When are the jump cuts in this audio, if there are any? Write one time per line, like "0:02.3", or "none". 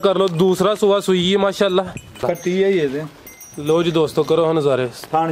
0:02.2